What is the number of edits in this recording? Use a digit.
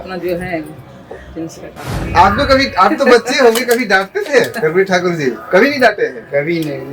1